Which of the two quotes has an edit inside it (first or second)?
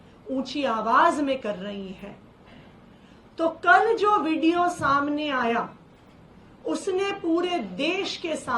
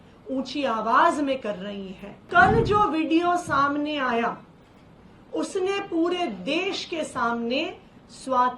second